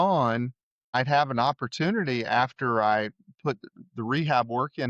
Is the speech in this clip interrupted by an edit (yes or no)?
yes